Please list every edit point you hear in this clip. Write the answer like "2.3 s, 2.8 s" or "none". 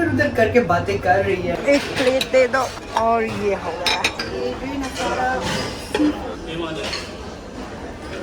1.6 s

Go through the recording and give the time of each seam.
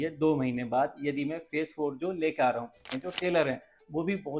3.0 s

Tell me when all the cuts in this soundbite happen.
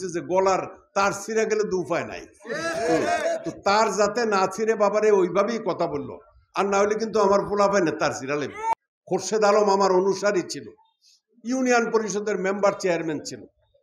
8.7 s

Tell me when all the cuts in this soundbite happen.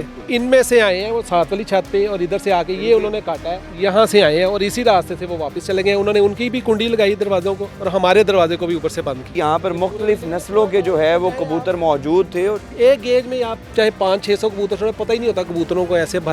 9.3 s, 12.7 s

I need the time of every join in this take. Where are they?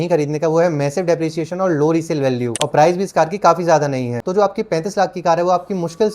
2.6 s, 4.2 s

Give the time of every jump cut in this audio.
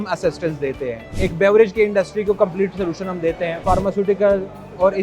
1.0 s, 3.6 s

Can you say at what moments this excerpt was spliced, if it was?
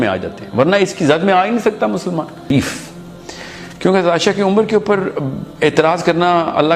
2.5 s

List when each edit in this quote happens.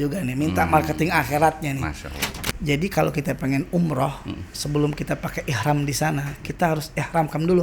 2.3 s

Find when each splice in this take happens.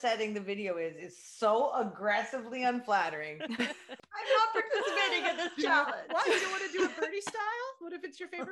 3.9 s

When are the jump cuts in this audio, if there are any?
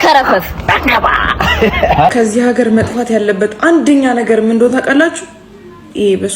2.1 s

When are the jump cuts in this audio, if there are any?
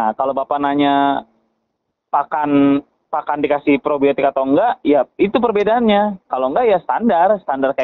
none

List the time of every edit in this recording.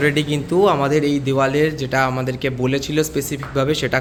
none

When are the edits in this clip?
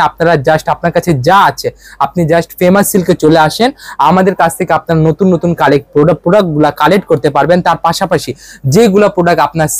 none

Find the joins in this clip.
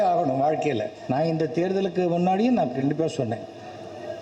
0.9 s

